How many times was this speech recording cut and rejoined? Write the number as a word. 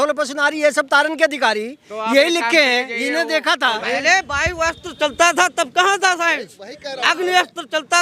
one